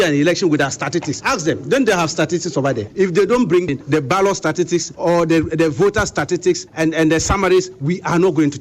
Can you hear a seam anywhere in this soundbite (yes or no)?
yes